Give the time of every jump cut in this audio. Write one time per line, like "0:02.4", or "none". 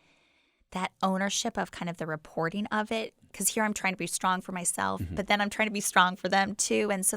0:03.3